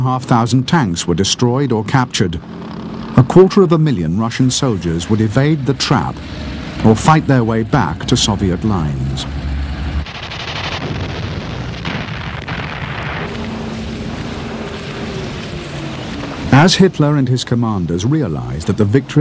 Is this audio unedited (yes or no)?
no